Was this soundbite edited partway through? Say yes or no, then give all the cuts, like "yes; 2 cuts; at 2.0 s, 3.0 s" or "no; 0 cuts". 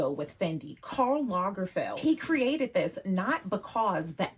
yes; 1 cut; at 1.9 s